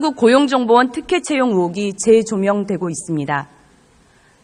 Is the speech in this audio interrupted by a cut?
yes; 1 cut; at 1.4 s

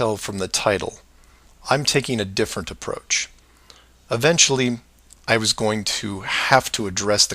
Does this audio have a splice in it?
no; 0 cuts

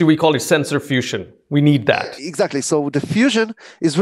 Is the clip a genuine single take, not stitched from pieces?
yes; 0 cuts

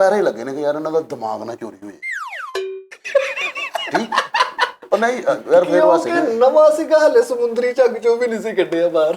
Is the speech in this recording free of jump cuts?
yes; 0 cuts

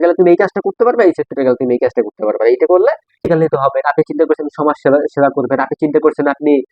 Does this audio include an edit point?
yes; 1 cut; at 3.2 s

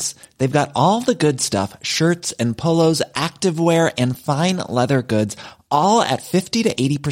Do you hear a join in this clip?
no; 0 cuts

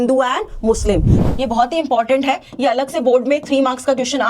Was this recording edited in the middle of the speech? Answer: yes; 1 cut; at 1.1 s

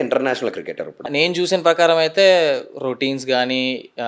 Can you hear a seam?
yes; 1 cut; at 1.1 s

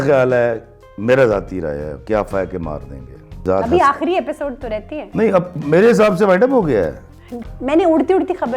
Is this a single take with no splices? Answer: no; 2 cuts; at 3.4 s, 7.5 s

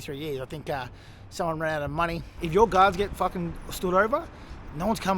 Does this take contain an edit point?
yes; 1 cut; at 2.3 s

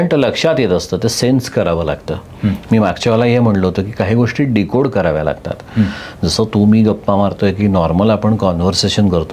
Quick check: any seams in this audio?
no; 0 cuts

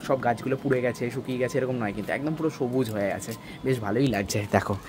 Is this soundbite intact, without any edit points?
yes; 0 cuts

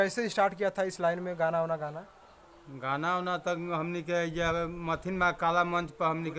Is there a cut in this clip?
no; 0 cuts

